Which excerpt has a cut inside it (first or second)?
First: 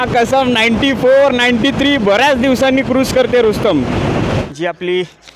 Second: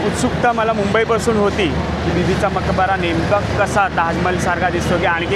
first